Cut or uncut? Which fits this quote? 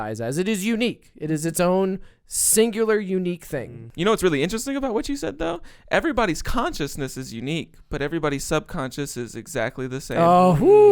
cut